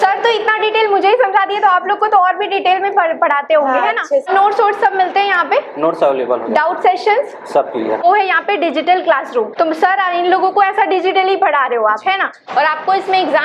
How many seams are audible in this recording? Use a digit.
4